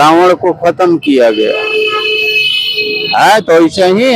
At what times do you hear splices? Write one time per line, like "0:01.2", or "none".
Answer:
none